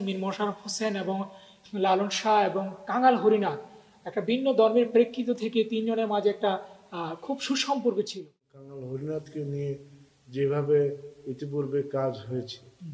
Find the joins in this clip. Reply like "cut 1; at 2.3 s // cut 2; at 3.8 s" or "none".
cut 1; at 8.4 s